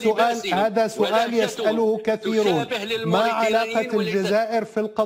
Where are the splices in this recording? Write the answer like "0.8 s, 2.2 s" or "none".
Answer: none